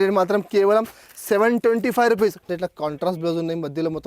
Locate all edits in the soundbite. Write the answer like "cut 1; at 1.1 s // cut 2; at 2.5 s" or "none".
cut 1; at 2.5 s